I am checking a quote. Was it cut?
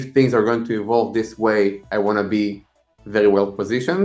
no; 0 cuts

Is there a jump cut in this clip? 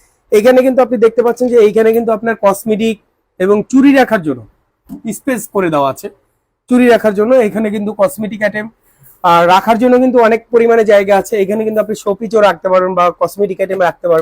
no; 0 cuts

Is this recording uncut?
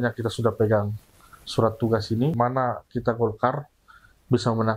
no; 1 cut; at 2.4 s

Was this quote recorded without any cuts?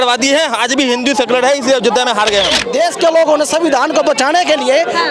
no; 1 cut; at 2.7 s

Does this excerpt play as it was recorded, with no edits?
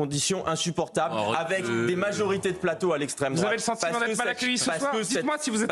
yes; 0 cuts

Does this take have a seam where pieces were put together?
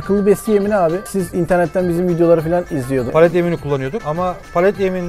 yes; 3 cuts; at 1.1 s, 3.1 s, 4.0 s

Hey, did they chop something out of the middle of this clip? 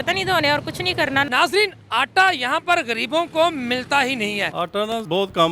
yes; 2 cuts; at 1.3 s, 4.6 s

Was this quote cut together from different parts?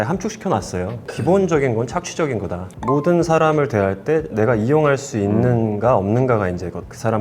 yes; 2 cuts; at 1.0 s, 2.7 s

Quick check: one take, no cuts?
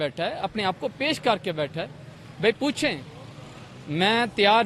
yes; 0 cuts

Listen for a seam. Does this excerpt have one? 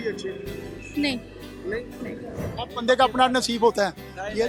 yes; 1 cut; at 2.5 s

